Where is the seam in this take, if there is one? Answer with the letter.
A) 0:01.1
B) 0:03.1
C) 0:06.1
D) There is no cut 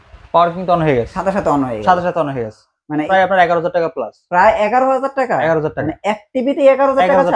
B